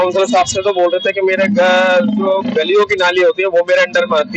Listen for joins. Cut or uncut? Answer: uncut